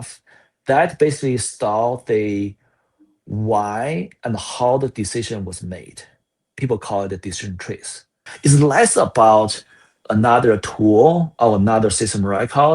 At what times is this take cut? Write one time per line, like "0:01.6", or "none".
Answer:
0:08.3